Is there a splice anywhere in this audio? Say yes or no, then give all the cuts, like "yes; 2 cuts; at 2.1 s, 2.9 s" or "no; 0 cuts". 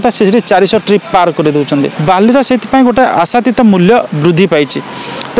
yes; 1 cut; at 1.9 s